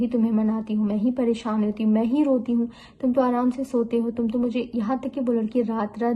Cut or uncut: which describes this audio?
uncut